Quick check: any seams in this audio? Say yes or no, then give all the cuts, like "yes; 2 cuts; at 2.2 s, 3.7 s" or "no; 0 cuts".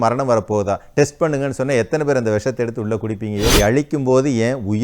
yes; 1 cut; at 3.6 s